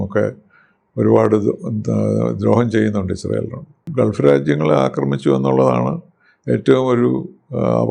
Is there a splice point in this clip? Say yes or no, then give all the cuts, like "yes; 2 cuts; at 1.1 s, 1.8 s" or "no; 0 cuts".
yes; 1 cut; at 3.8 s